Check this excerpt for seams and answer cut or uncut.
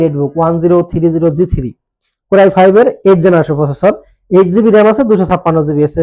uncut